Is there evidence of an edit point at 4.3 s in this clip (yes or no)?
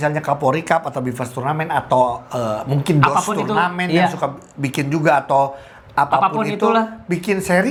no